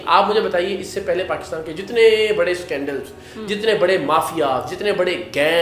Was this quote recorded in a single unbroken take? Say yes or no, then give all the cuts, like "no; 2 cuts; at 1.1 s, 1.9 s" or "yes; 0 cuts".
yes; 0 cuts